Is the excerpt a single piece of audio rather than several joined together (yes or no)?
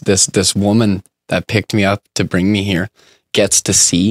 yes